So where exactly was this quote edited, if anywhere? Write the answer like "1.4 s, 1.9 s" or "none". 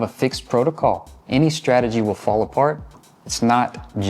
2.9 s